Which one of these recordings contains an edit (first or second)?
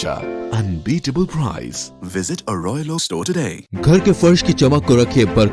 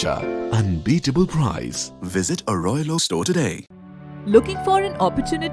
first